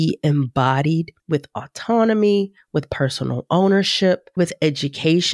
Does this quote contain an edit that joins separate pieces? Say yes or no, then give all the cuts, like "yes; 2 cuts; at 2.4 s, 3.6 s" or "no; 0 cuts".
yes; 2 cuts; at 1.1 s, 4.4 s